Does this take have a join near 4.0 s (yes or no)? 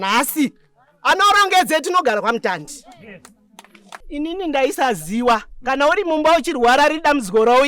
yes